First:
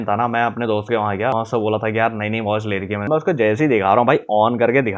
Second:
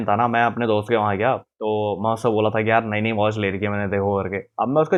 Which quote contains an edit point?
first; 2 cuts; at 1.3 s, 3.1 s

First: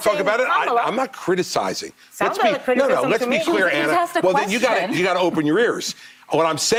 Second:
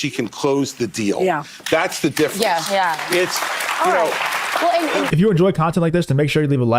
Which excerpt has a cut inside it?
second; 1 cut; at 5.1 s

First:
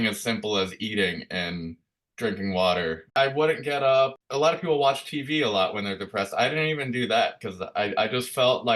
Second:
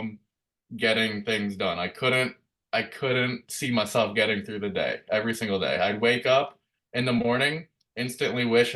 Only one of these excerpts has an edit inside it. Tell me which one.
first; 2 cuts; at 3.1 s, 4.2 s

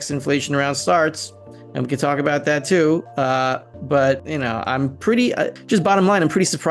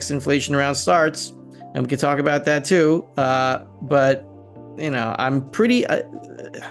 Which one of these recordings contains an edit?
first; 2 cuts; at 4.3 s, 5.6 s

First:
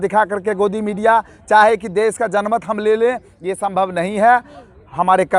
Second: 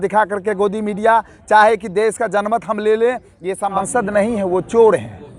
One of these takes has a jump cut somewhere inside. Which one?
second; 1 cut; at 3.8 s

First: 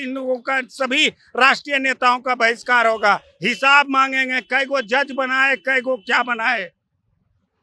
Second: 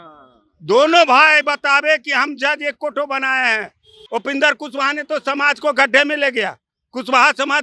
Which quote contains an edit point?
second; 1 cut; at 4.0 s

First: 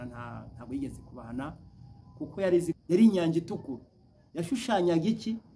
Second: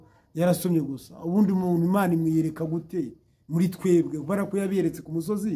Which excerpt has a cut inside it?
first; 1 cut; at 2.8 s

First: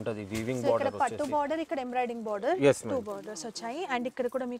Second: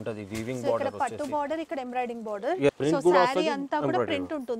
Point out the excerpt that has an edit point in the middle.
second; 1 cut; at 2.7 s

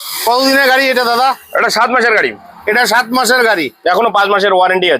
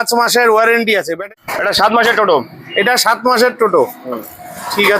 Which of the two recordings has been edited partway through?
second; 1 cut; at 1.2 s

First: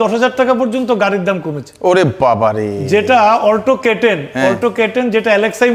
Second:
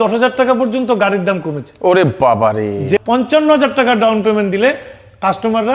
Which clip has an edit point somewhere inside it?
second; 1 cut; at 3.0 s

